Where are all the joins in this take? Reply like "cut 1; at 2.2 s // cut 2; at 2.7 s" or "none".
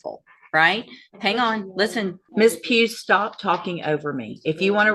cut 1; at 2.2 s